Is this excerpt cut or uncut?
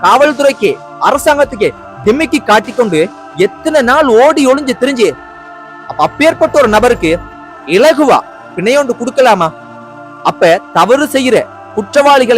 uncut